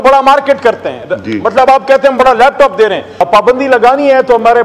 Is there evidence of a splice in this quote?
yes; 1 cut; at 3.1 s

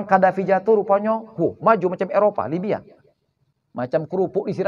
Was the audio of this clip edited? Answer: no; 0 cuts

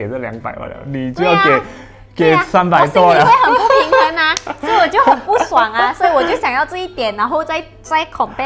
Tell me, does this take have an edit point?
no; 0 cuts

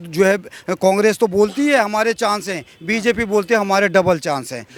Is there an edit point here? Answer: no; 0 cuts

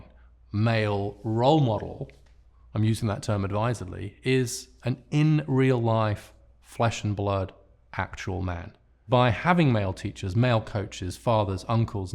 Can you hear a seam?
yes; 1 cut; at 9.0 s

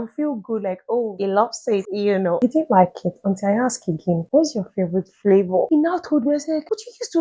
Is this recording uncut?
yes; 0 cuts

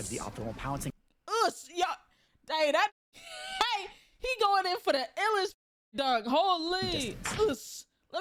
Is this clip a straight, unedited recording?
yes; 0 cuts

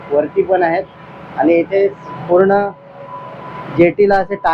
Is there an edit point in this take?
no; 0 cuts

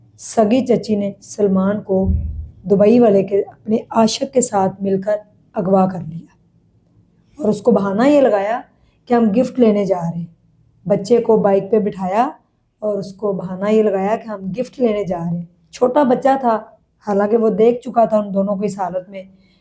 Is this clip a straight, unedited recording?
yes; 0 cuts

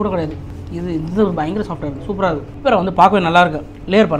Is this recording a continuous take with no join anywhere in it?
no; 1 cut; at 2.5 s

